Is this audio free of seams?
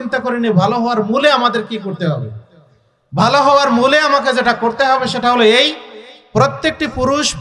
yes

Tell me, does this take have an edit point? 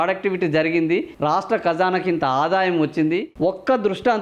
yes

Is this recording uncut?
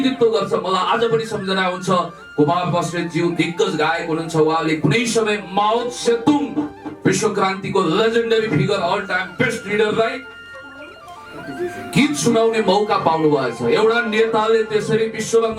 yes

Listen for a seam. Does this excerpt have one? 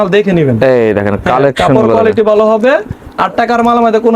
no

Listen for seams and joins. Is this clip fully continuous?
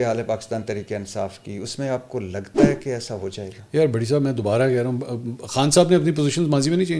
yes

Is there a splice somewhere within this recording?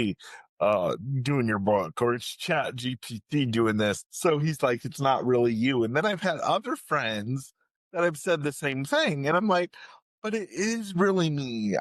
yes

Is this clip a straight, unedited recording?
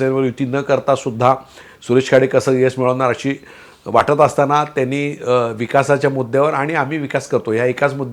yes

